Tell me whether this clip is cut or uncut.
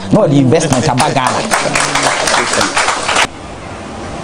cut